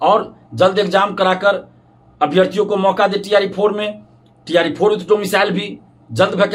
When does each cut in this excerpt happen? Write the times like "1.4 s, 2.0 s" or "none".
none